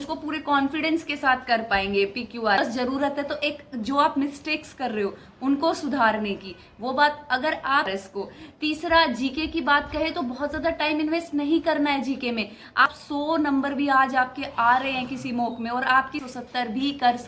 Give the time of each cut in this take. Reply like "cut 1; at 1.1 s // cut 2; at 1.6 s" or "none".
cut 1; at 2.6 s // cut 2; at 8.0 s // cut 3; at 12.8 s // cut 4; at 16.2 s

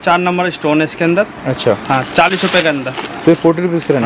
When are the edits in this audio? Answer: none

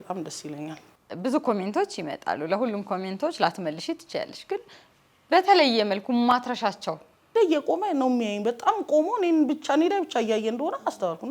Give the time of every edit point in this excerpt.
cut 1; at 1.0 s // cut 2; at 7.3 s

